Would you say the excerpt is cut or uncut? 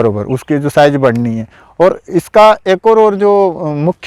uncut